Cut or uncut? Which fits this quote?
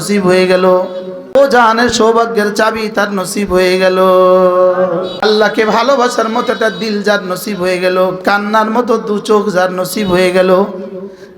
cut